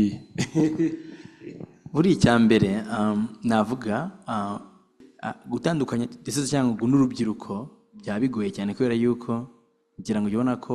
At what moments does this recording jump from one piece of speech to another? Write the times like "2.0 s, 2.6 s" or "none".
5.1 s